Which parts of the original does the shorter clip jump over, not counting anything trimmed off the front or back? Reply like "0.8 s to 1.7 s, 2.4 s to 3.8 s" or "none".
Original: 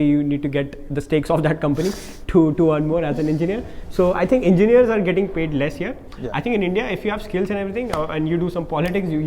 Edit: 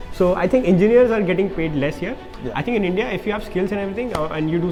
none

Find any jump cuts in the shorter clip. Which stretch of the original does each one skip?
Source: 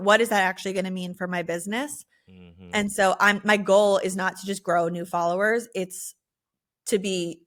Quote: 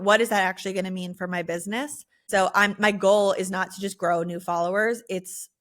2.3 s to 2.9 s

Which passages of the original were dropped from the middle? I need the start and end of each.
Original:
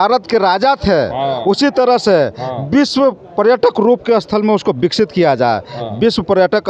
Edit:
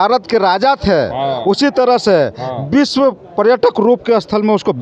none

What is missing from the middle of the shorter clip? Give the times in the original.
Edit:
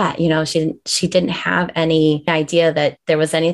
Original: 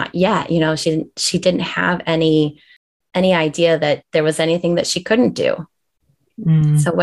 2.6 s to 3.4 s

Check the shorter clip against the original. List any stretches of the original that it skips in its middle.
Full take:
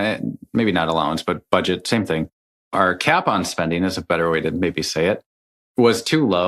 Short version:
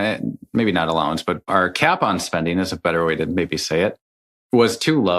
1.4 s to 2.7 s

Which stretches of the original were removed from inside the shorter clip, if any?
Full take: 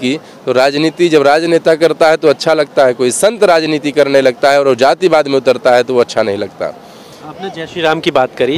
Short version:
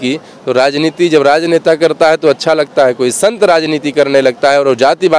none

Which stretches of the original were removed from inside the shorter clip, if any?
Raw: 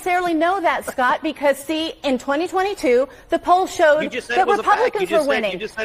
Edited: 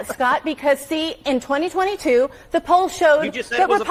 none

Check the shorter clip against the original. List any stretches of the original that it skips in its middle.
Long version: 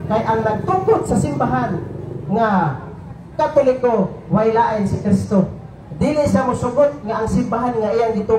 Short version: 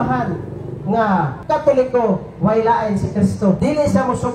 2.8 s to 3.3 s, 5.5 s to 6.0 s

